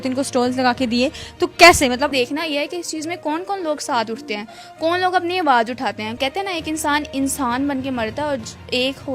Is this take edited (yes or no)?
yes